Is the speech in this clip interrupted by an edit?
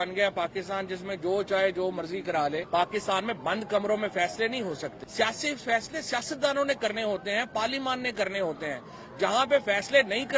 yes; 2 cuts; at 2.6 s, 5.0 s

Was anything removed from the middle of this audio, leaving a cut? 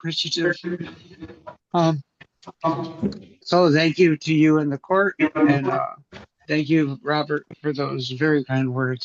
no; 0 cuts

